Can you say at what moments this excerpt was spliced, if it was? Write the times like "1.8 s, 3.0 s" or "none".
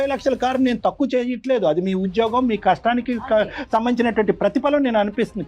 none